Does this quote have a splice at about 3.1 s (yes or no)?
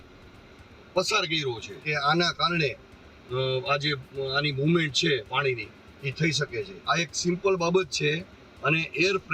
no